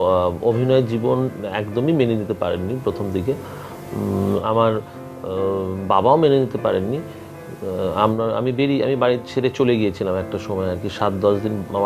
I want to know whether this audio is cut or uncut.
uncut